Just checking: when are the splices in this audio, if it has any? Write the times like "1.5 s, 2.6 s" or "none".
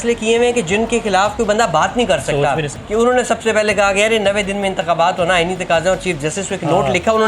2.8 s